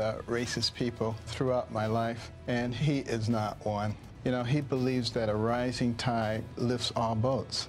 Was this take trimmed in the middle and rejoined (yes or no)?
yes